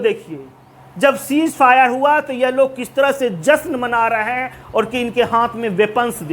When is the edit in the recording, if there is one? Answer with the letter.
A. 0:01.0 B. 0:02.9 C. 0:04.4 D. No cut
C